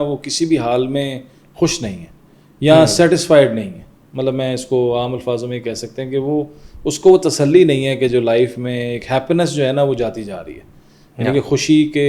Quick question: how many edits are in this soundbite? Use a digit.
0